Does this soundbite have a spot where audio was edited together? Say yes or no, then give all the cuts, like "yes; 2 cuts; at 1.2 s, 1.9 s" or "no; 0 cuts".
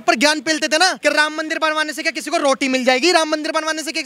yes; 1 cut; at 1.0 s